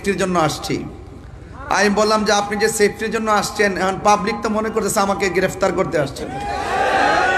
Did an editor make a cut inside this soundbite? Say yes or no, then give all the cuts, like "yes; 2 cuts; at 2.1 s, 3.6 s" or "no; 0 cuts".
no; 0 cuts